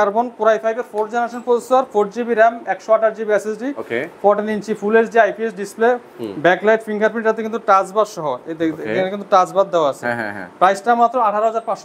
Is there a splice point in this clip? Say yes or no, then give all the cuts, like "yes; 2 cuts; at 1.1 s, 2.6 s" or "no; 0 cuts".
no; 0 cuts